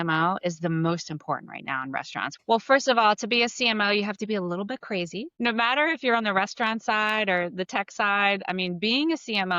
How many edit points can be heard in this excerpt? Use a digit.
1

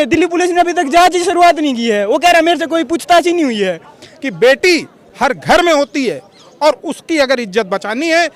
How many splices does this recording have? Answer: 1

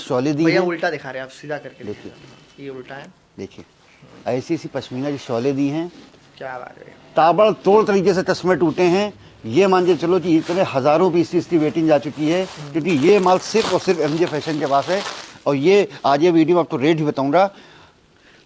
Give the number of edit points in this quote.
0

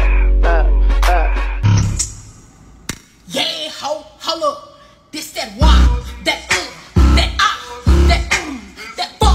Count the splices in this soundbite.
1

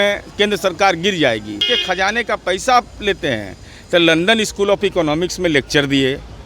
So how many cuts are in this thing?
1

